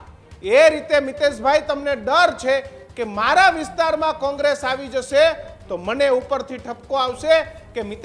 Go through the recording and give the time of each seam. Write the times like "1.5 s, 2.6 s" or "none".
none